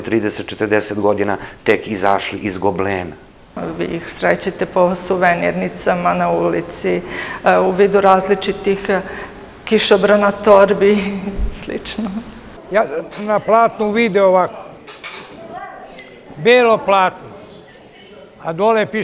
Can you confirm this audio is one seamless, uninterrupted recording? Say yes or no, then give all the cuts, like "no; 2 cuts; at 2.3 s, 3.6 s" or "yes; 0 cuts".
no; 2 cuts; at 3.6 s, 12.6 s